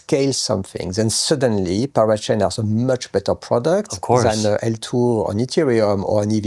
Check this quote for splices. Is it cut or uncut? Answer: uncut